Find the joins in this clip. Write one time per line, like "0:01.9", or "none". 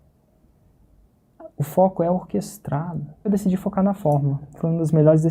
0:03.3